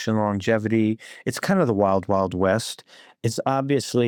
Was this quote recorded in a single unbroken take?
yes; 0 cuts

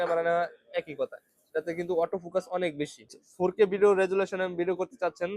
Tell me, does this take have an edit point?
yes; 1 cut; at 3.2 s

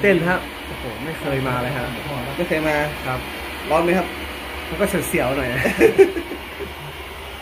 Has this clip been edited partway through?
no; 0 cuts

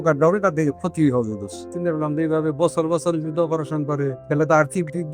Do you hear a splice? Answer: yes; 2 cuts; at 1.7 s, 4.2 s

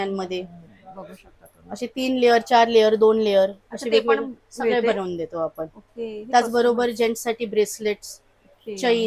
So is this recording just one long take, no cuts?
yes; 0 cuts

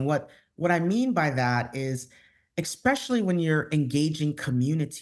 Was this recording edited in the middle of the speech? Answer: no; 0 cuts

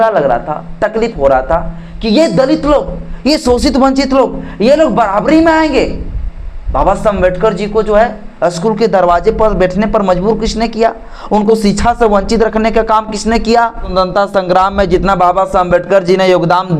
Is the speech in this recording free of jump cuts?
no; 1 cut; at 13.9 s

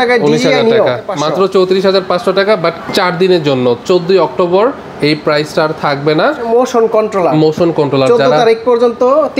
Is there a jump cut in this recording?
yes; 3 cuts; at 1.1 s, 2.9 s, 6.5 s

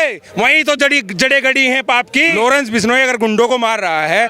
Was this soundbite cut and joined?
yes; 1 cut; at 2.4 s

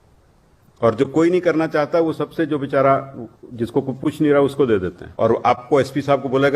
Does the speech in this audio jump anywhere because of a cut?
yes; 1 cut; at 5.0 s

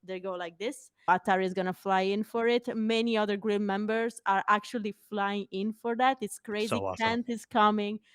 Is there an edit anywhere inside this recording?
yes; 1 cut; at 1.1 s

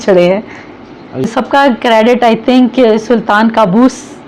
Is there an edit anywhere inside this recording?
yes; 1 cut; at 1.2 s

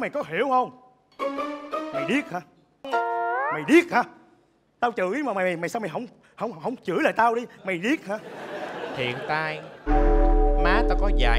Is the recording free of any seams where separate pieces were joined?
yes; 0 cuts

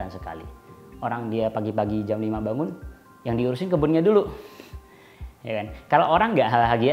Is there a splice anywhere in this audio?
no; 0 cuts

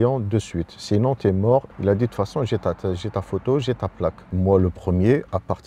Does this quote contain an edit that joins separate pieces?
yes; 2 cuts; at 1.7 s, 4.2 s

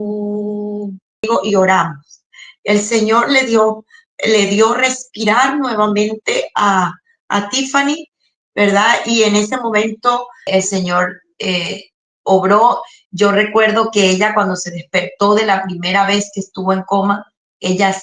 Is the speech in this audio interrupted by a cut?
yes; 2 cuts; at 1.3 s, 10.5 s

